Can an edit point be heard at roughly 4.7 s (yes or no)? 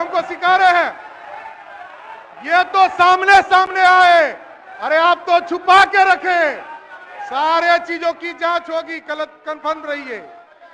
no